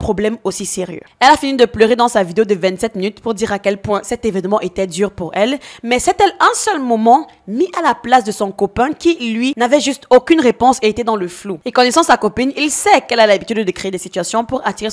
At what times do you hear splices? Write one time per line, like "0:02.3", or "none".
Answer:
none